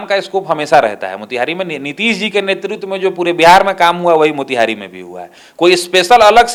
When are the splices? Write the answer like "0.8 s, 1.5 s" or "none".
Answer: none